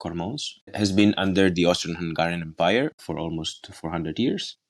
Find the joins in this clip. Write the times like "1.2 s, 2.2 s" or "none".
3.0 s